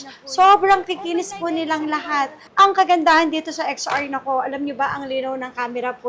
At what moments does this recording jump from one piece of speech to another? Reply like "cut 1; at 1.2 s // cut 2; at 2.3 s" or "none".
cut 1; at 2.4 s